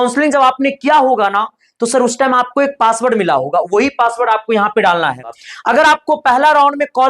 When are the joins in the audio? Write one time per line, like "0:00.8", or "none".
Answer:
0:05.4